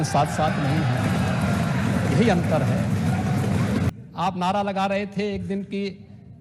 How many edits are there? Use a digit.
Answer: 1